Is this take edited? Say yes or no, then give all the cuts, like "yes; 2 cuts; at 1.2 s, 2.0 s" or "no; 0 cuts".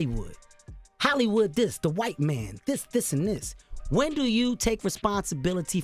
no; 0 cuts